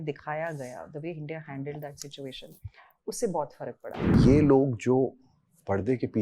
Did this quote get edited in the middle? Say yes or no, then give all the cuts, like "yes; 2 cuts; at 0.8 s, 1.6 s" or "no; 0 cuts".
yes; 1 cut; at 4.1 s